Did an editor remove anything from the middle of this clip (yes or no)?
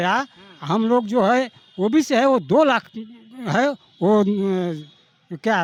no